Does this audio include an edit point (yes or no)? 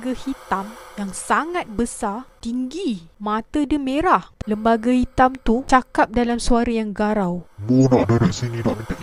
yes